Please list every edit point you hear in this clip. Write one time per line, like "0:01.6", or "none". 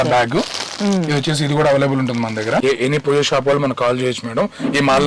0:02.6